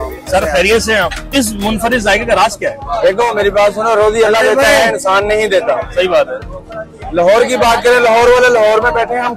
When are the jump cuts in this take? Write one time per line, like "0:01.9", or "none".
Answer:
0:01.3